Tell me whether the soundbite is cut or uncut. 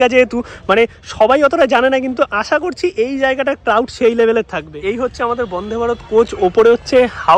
cut